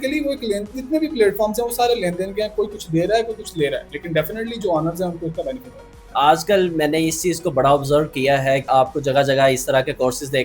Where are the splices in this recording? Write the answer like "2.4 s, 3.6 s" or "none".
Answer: none